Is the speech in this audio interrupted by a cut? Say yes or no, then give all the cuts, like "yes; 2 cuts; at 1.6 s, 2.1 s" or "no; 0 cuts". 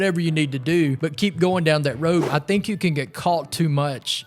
yes; 2 cuts; at 1.0 s, 2.3 s